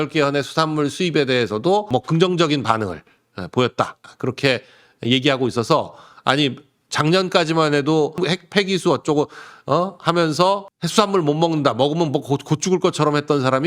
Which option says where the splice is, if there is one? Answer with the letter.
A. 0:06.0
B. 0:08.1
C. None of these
B